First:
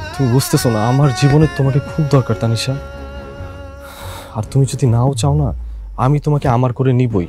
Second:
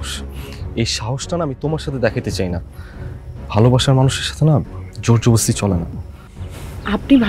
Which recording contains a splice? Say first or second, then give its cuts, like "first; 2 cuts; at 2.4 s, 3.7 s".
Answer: first; 2 cuts; at 2.8 s, 4.1 s